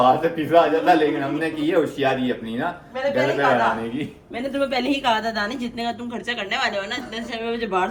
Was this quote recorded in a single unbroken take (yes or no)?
yes